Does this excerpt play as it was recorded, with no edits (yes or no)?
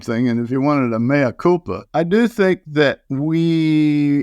no